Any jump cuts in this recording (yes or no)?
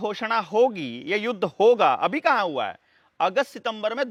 no